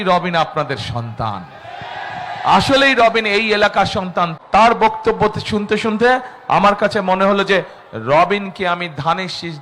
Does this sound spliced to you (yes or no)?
yes